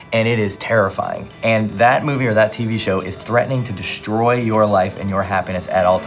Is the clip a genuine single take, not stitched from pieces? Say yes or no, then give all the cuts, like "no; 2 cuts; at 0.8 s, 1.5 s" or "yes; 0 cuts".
yes; 0 cuts